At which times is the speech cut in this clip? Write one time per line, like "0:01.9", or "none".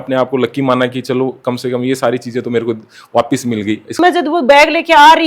0:03.9